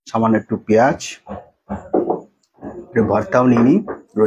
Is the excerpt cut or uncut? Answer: uncut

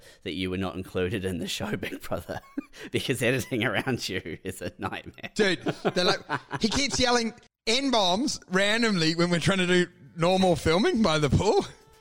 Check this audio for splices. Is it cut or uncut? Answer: cut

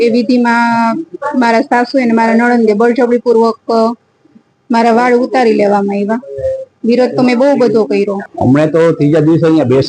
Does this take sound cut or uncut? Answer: cut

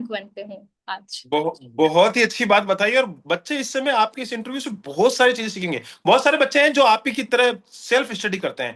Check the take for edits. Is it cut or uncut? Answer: uncut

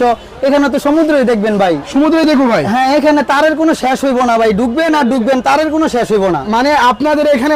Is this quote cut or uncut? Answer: uncut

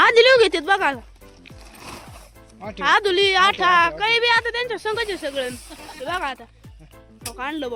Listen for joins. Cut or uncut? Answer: uncut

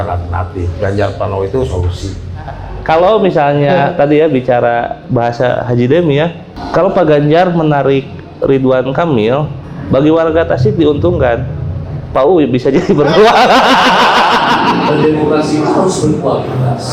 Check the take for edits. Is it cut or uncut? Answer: cut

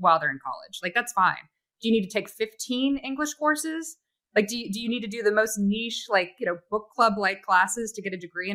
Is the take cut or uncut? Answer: uncut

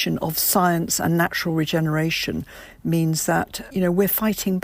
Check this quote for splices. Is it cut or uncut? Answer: cut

